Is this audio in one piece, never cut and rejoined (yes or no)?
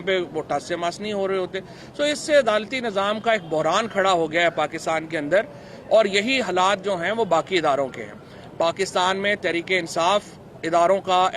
yes